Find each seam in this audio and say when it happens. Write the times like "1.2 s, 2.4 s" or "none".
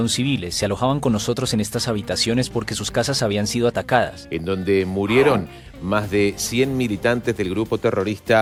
none